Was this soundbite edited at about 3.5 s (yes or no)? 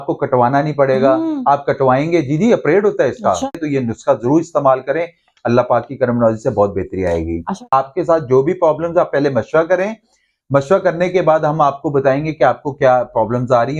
yes